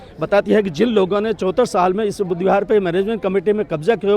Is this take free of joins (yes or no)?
yes